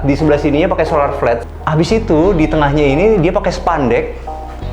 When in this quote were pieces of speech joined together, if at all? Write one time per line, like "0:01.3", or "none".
0:01.4